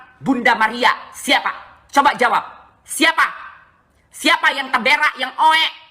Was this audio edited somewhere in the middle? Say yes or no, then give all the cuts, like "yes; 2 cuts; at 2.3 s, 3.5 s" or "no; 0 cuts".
yes; 1 cut; at 1.1 s